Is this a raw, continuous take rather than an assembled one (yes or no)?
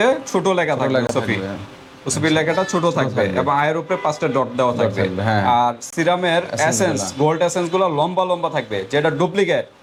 yes